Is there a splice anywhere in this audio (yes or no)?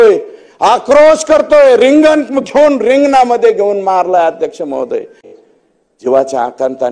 yes